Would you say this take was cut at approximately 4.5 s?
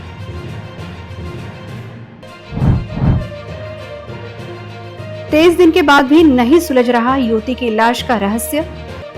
no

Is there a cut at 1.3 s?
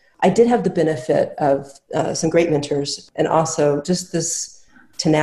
no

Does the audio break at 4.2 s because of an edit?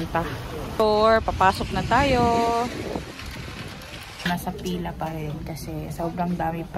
yes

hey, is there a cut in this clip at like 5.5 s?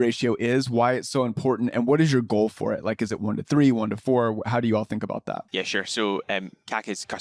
no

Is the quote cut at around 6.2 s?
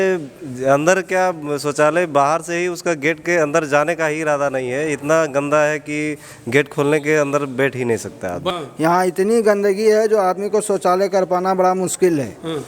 no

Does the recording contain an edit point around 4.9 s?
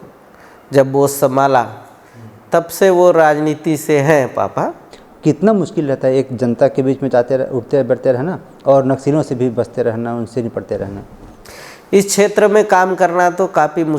yes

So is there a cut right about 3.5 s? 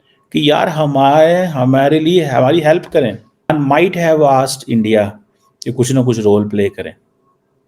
yes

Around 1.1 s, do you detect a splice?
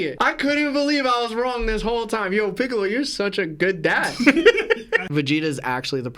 no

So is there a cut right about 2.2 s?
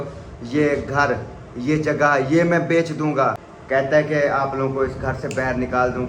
no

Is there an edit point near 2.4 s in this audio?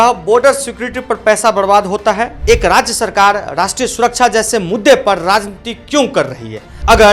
yes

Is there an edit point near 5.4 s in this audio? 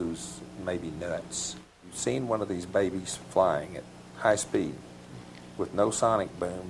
no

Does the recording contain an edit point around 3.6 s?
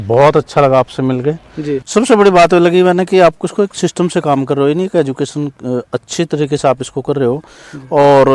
no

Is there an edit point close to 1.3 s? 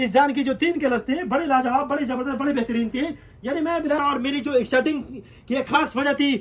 no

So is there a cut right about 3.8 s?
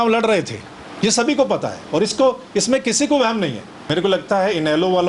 yes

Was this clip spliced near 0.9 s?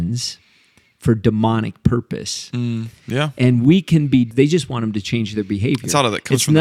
no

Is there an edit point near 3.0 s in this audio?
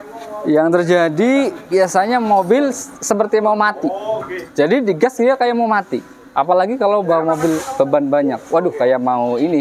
no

